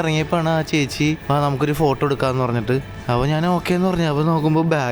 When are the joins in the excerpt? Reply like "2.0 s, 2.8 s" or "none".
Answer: 1.2 s, 2.9 s